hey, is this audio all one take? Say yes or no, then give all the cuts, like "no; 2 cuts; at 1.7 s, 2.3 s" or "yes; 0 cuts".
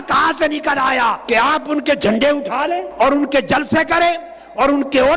no; 2 cuts; at 1.2 s, 2.9 s